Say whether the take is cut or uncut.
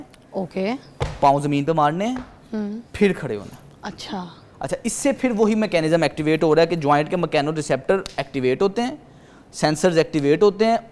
uncut